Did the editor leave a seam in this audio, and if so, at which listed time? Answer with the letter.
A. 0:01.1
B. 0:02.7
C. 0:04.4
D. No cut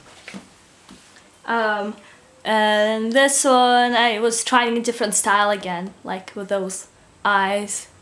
C